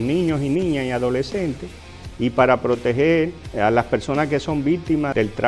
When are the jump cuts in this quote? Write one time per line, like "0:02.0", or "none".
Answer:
none